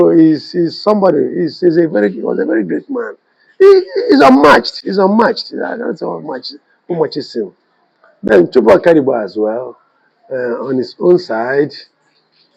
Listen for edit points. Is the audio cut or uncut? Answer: uncut